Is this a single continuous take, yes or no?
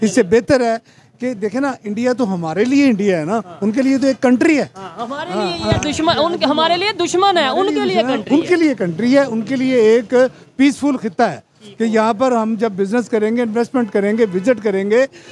yes